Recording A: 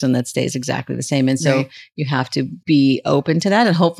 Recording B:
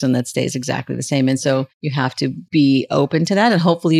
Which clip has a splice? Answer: B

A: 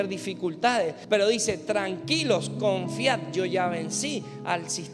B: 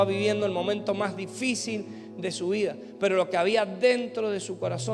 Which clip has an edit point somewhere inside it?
A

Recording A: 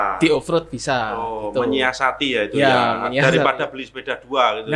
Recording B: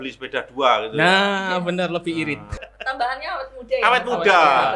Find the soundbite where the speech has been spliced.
B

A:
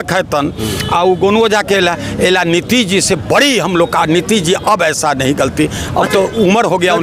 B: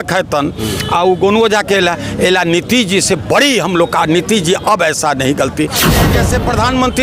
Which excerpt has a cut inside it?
B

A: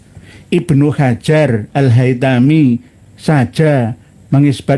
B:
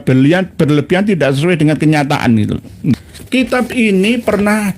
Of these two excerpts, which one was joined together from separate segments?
B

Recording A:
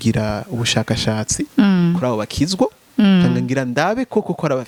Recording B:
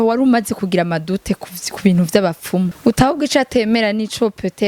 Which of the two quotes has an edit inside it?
B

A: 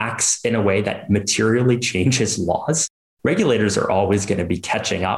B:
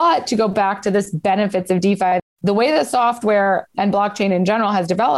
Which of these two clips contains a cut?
B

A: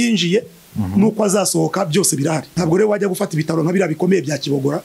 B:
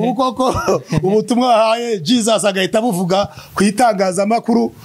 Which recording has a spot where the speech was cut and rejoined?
A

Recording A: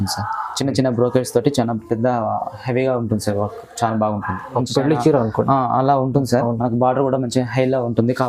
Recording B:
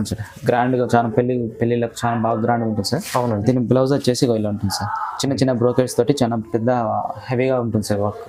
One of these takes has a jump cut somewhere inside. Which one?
A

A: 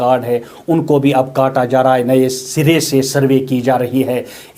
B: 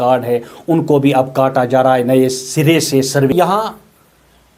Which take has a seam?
B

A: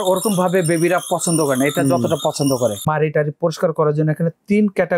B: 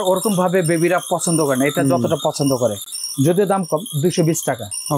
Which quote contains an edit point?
A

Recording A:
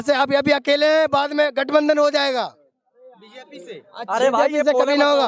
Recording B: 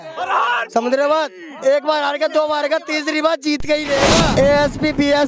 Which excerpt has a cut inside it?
B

